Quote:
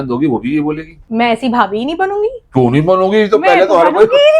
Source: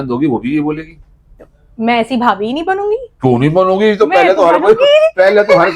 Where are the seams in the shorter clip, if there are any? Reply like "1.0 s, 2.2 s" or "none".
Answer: 0.9 s